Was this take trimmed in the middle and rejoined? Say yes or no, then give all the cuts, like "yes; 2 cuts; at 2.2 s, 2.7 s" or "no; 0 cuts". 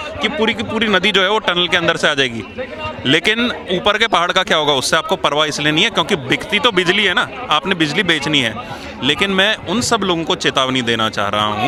no; 0 cuts